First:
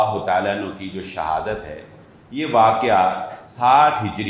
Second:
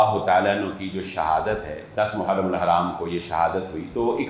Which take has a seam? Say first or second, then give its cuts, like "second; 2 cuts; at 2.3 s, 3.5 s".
second; 1 cut; at 1.8 s